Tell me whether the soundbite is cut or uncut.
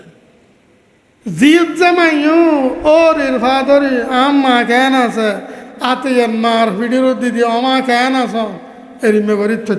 uncut